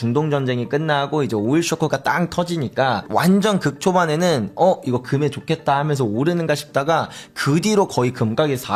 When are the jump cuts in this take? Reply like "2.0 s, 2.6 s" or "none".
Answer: none